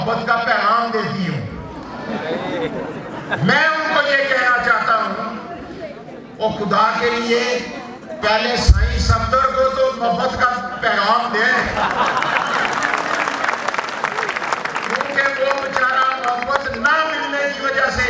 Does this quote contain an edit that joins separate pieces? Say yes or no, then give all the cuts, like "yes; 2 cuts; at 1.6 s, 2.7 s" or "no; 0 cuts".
no; 0 cuts